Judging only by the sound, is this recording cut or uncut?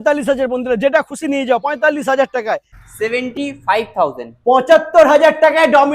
cut